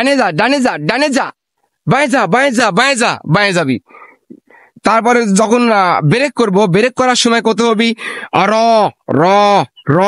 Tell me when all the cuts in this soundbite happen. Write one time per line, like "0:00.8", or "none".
none